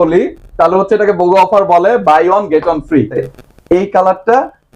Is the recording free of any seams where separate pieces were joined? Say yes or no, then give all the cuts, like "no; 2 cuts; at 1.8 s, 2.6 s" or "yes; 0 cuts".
no; 1 cut; at 3.3 s